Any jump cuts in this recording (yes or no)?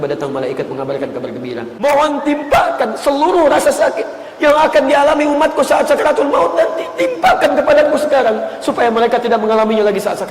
yes